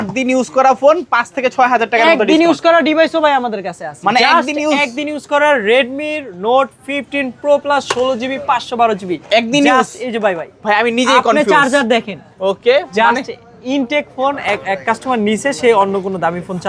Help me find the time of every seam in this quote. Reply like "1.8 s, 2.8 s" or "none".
none